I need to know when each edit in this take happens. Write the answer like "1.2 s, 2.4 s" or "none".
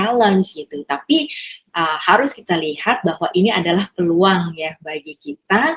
none